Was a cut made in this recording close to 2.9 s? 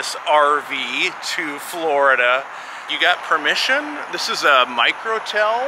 yes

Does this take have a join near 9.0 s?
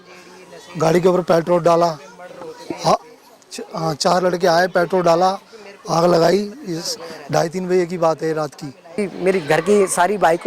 yes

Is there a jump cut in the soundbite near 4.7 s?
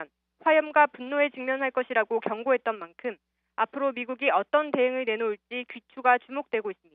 no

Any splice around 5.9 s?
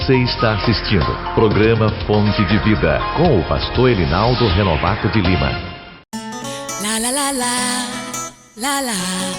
yes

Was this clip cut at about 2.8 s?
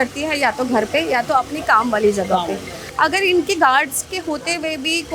yes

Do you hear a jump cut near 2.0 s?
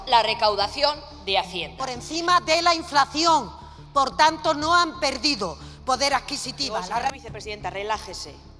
yes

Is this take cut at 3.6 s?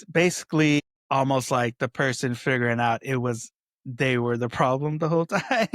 no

